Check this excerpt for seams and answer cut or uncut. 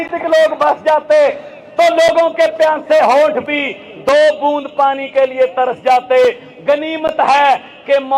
uncut